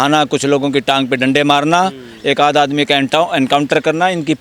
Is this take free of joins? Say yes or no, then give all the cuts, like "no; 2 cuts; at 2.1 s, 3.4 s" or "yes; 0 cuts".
yes; 0 cuts